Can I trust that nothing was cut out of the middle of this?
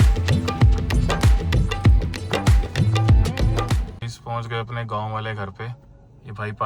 no; 1 cut; at 3.8 s

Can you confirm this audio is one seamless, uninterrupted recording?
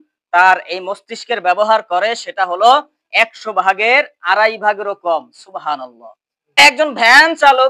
no; 1 cut; at 6.6 s

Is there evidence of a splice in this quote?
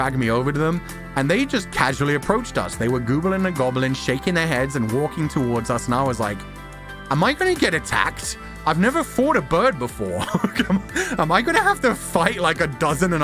no; 0 cuts

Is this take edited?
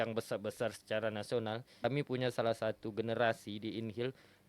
yes; 1 cut; at 1.8 s

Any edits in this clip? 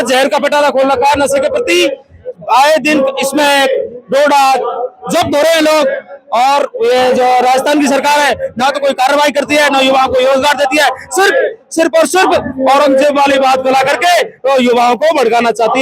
no; 0 cuts

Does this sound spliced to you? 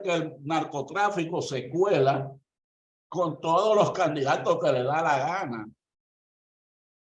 no; 0 cuts

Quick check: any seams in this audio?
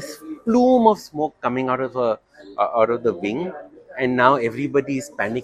no; 0 cuts

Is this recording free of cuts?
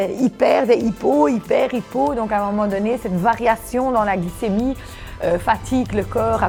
yes; 0 cuts

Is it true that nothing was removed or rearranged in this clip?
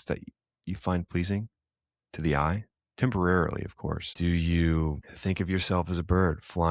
no; 2 cuts; at 4.1 s, 5.1 s

